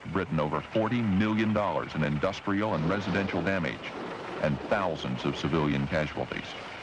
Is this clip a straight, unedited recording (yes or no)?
yes